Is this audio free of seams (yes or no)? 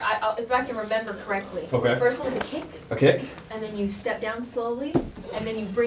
yes